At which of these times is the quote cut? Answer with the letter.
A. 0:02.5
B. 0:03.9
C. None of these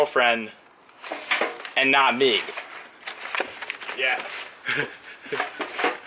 A